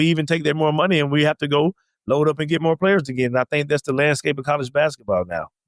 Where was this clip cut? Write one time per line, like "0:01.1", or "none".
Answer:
none

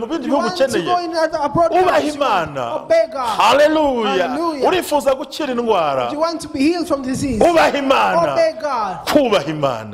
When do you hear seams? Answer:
none

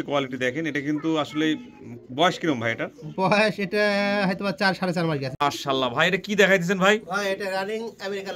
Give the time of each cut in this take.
0:05.3

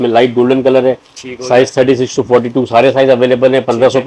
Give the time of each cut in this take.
none

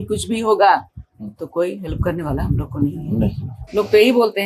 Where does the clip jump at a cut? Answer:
0:03.5

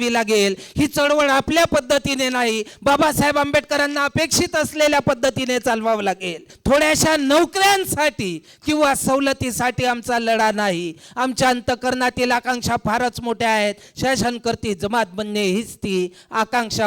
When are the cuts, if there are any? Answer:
0:06.5

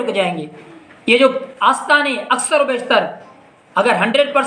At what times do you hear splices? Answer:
none

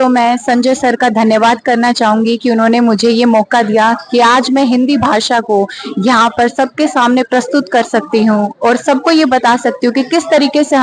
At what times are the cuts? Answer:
none

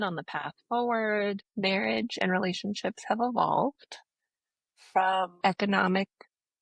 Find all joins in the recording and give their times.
0:01.4

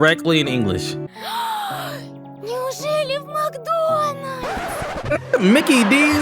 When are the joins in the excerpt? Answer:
0:01.0

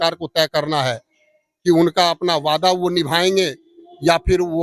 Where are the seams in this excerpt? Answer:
none

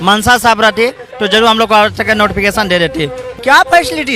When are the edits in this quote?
0:03.3

